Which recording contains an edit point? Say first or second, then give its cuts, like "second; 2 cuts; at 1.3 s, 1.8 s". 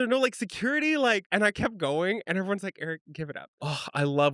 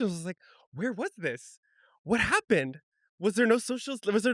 first; 2 cuts; at 1.3 s, 3.4 s